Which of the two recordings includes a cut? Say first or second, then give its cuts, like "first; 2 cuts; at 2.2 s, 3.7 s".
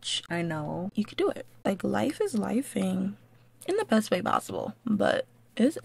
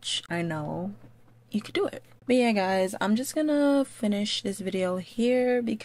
first; 1 cut; at 1.4 s